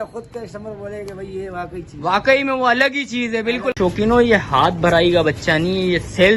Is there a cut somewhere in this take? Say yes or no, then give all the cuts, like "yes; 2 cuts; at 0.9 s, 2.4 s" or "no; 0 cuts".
yes; 1 cut; at 3.8 s